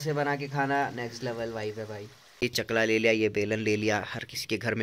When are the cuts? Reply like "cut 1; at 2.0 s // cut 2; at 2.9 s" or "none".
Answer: cut 1; at 2.2 s